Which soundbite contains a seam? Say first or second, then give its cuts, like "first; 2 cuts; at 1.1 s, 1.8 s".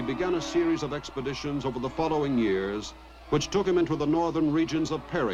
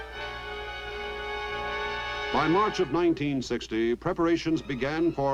first; 1 cut; at 1.8 s